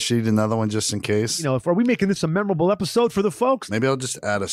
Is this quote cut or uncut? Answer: cut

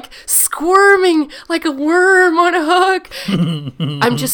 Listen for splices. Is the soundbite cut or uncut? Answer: cut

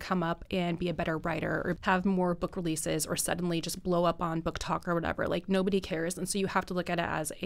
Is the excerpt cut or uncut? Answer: cut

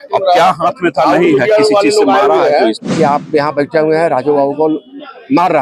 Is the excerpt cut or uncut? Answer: cut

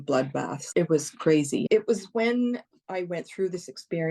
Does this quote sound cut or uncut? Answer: cut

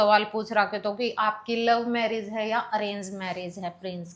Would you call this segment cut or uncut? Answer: uncut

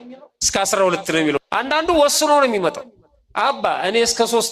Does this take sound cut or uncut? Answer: cut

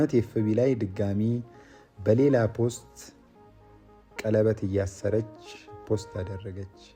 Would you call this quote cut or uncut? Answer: uncut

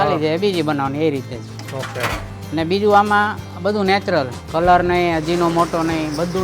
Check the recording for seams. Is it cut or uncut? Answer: cut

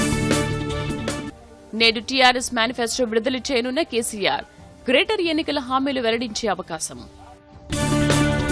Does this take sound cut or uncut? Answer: uncut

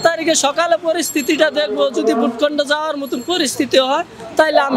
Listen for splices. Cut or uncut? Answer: uncut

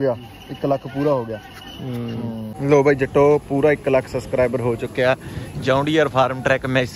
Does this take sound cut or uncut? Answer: cut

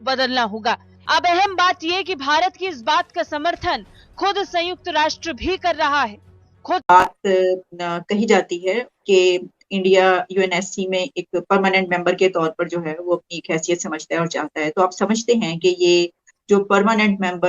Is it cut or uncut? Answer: cut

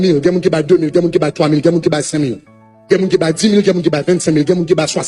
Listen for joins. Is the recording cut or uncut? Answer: uncut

